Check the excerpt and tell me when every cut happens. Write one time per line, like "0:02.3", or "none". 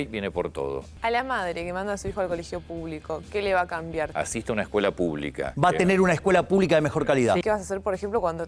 0:00.9
0:04.1
0:05.5
0:07.4